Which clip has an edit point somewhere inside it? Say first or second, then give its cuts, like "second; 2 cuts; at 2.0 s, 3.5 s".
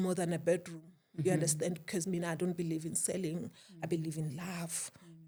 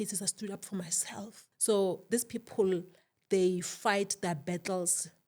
second; 1 cut; at 1.4 s